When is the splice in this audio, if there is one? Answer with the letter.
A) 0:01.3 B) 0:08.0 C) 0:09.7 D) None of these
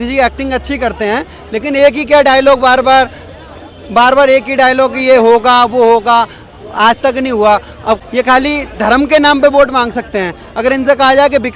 B